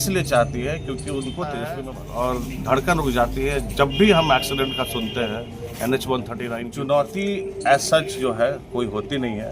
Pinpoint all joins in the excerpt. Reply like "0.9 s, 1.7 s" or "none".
1.9 s, 6.7 s